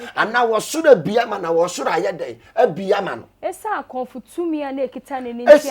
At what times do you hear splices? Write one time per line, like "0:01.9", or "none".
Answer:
none